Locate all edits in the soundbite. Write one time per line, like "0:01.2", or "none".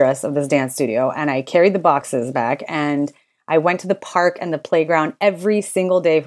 0:02.1